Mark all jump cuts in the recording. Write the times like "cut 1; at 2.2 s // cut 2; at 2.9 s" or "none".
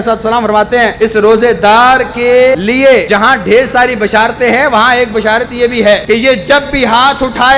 cut 1; at 0.9 s // cut 2; at 3.1 s // cut 3; at 6.0 s